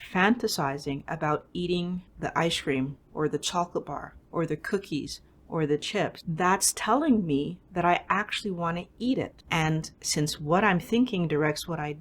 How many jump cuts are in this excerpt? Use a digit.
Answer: 3